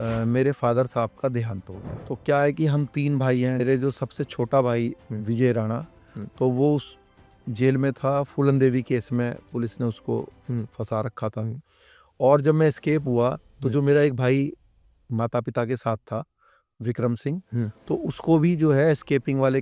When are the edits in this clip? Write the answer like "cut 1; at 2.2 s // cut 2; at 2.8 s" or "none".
cut 1; at 3.6 s